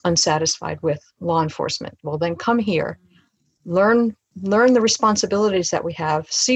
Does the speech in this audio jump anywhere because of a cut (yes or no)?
no